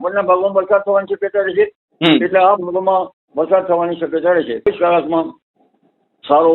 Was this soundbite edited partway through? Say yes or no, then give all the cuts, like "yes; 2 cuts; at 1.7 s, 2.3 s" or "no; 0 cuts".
yes; 1 cut; at 4.7 s